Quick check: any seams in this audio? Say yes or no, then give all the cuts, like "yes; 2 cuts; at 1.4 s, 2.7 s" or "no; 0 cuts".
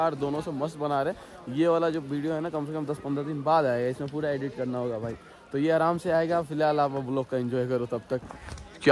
no; 0 cuts